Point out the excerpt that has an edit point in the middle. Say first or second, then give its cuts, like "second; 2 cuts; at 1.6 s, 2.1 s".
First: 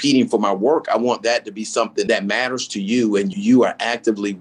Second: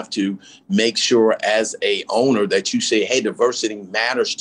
first; 2 cuts; at 2.1 s, 3.3 s